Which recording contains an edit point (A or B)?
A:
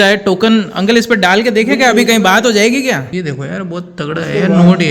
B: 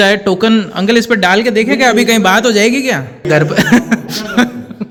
A